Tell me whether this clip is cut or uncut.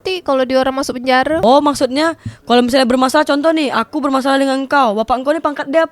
cut